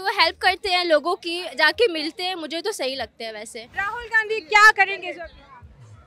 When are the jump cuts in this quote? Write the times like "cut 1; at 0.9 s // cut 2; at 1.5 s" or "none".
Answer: cut 1; at 3.8 s